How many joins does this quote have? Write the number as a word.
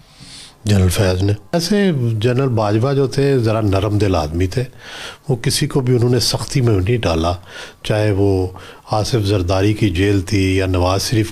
one